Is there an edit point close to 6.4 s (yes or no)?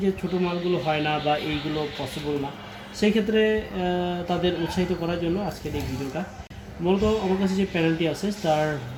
no